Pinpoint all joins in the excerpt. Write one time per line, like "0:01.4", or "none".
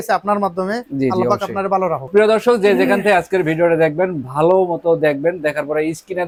none